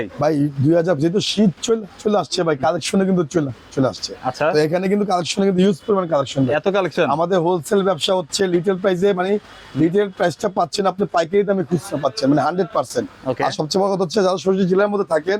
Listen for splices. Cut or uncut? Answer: uncut